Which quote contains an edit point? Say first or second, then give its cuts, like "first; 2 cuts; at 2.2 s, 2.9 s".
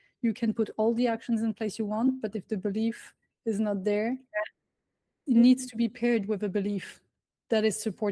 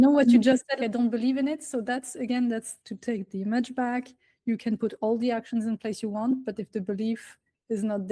first; 1 cut; at 5.3 s